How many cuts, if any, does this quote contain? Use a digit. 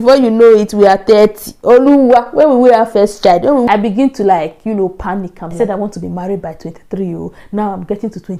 2